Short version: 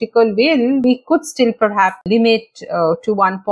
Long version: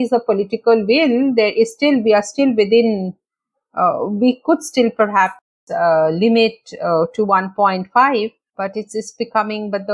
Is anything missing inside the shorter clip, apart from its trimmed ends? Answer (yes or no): yes